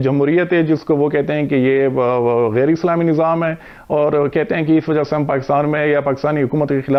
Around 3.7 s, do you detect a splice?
no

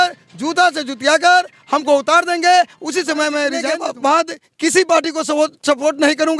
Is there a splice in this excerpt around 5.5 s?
no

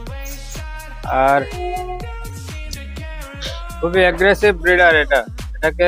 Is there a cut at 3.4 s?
no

